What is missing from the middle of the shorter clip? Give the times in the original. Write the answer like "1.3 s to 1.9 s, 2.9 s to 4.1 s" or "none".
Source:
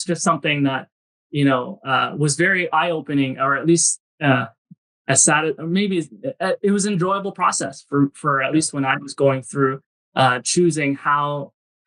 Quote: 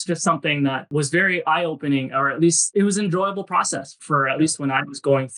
0.9 s to 2.1 s, 4.0 s to 6.6 s, 7.9 s to 8.1 s

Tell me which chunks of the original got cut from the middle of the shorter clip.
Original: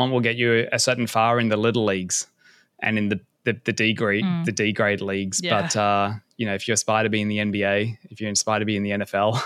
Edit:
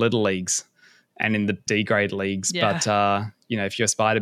3.3 s to 4.5 s

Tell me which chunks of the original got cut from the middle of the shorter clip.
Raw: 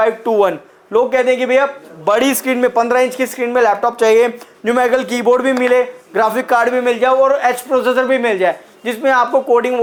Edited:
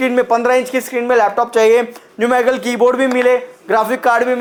none

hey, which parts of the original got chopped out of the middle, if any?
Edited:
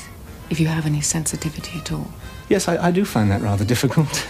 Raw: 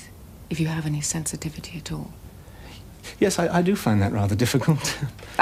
2.3 s to 3.0 s

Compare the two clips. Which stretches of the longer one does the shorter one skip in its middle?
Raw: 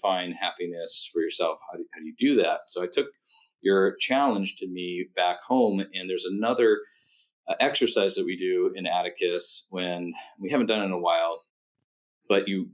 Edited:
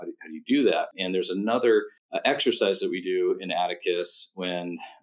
2.7 s to 5.9 s, 7.0 s to 7.4 s

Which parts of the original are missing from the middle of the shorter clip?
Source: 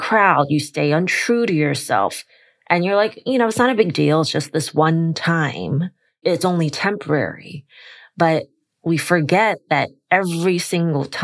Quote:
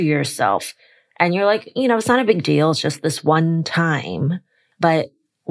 6.0 s to 7.9 s

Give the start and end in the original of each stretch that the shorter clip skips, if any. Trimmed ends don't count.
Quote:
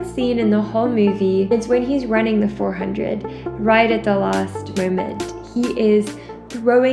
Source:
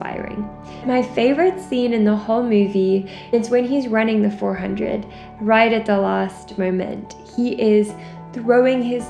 3.0 s to 3.3 s

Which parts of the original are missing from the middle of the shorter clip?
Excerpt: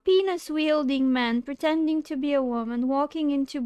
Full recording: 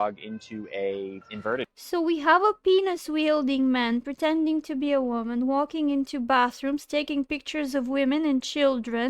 none

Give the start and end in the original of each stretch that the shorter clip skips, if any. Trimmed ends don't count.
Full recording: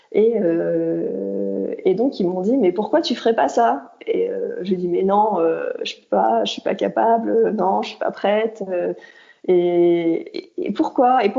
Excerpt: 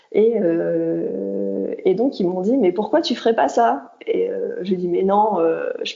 none

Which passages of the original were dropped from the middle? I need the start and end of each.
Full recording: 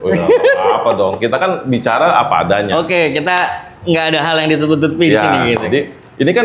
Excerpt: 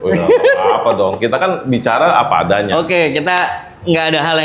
none

